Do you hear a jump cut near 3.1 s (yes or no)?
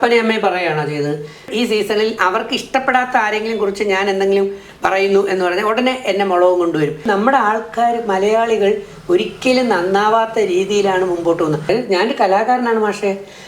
no